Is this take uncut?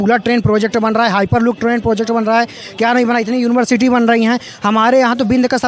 yes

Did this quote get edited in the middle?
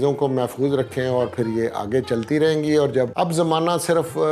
yes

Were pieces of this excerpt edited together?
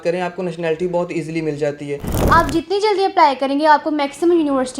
yes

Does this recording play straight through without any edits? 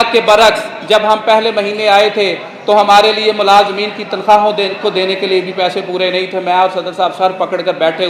yes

